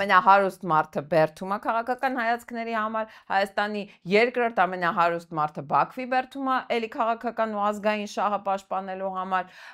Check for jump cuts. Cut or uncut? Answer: uncut